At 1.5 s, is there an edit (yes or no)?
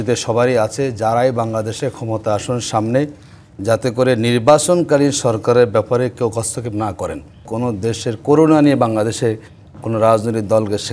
no